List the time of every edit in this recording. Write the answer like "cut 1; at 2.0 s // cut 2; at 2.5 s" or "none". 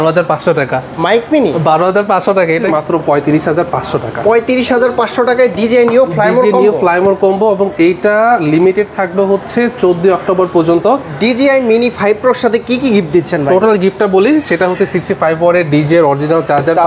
cut 1; at 2.6 s // cut 2; at 11.1 s